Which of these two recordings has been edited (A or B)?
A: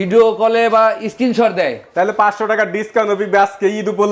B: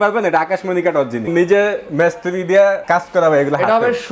B